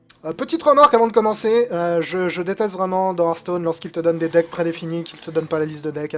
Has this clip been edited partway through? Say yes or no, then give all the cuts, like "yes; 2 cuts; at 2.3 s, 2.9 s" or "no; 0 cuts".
no; 0 cuts